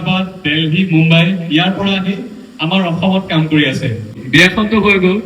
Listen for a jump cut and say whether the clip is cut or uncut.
cut